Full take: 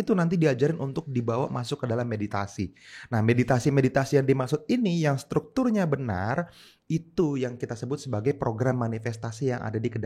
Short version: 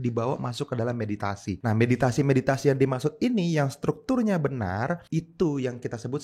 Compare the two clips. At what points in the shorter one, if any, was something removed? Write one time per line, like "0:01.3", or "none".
0:01.6
0:05.0